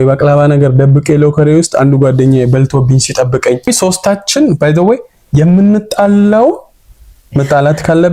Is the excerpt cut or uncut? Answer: cut